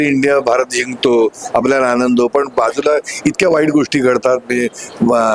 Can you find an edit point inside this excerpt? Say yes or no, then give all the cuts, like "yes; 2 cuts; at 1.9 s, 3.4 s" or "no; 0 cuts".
no; 0 cuts